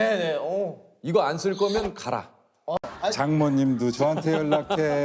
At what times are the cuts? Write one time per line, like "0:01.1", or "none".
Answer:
0:02.8